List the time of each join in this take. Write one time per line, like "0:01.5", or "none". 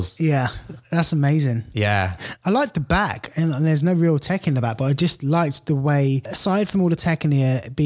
0:06.3

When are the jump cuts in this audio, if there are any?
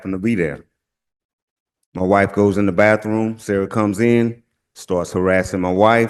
none

